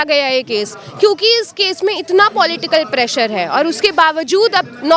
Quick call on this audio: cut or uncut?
uncut